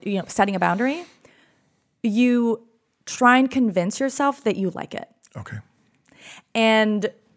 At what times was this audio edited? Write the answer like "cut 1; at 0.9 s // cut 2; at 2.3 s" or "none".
none